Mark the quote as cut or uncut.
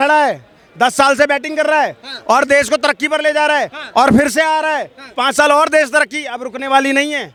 uncut